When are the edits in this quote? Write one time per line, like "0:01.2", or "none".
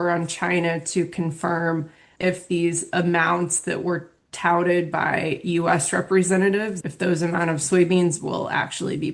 0:02.0
0:06.8